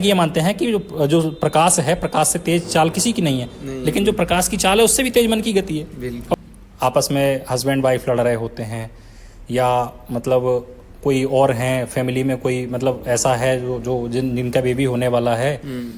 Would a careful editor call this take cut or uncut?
cut